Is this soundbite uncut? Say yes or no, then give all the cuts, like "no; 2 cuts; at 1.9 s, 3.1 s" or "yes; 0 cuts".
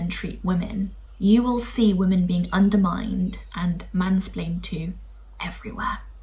no; 1 cut; at 1.0 s